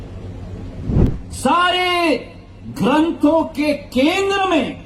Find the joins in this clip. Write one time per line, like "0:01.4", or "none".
0:01.1